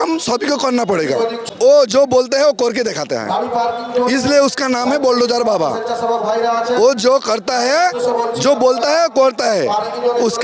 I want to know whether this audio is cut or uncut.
cut